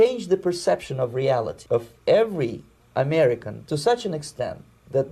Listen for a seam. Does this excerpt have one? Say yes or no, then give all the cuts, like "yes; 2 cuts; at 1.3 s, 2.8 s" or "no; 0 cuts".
yes; 2 cuts; at 1.6 s, 3.5 s